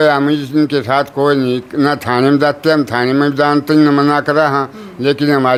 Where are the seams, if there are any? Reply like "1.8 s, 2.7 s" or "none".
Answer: none